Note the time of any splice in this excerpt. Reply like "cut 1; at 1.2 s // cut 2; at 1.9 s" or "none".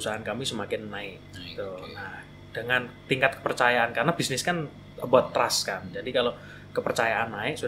none